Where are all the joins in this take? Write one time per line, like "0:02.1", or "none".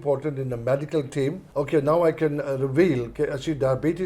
0:01.4